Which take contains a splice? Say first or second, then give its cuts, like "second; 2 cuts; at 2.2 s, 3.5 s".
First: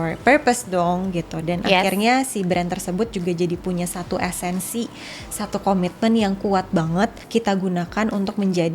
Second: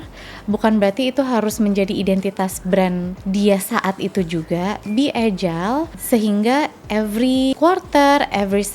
second; 3 cuts; at 3.1 s, 6.0 s, 7.5 s